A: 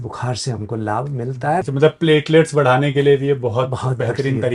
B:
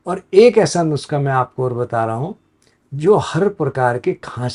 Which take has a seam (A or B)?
A